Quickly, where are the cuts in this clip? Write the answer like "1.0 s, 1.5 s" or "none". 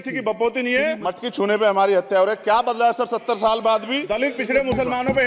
1.1 s, 4.0 s